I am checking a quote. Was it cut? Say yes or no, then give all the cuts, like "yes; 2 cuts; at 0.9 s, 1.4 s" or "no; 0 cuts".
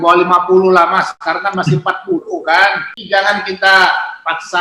yes; 2 cuts; at 1.1 s, 2.9 s